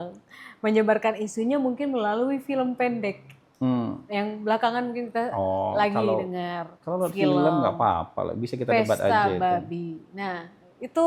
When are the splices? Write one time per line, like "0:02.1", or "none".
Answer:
none